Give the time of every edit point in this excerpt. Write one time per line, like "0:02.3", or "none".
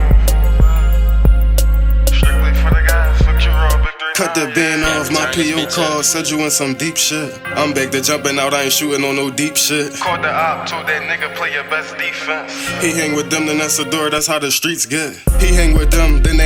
none